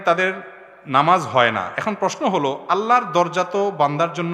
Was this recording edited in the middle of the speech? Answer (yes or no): no